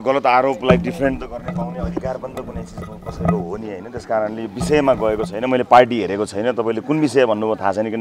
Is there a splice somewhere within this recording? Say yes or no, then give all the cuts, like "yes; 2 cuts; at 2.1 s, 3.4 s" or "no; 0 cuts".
no; 0 cuts